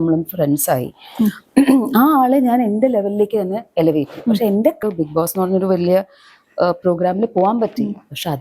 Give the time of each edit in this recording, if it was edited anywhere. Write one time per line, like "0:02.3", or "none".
0:04.8